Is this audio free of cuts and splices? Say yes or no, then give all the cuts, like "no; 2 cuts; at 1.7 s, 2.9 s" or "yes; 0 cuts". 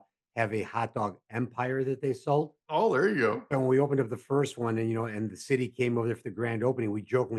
yes; 0 cuts